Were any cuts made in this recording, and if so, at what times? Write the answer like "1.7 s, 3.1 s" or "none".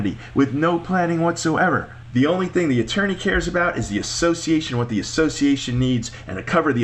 2.0 s